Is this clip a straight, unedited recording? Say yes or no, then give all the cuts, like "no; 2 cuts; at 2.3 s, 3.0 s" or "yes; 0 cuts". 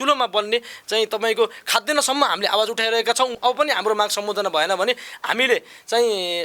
no; 1 cut; at 3.3 s